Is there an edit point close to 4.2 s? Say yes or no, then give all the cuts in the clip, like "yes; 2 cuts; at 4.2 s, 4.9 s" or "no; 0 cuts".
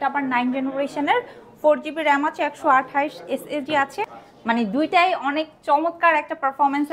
yes; 1 cut; at 4.2 s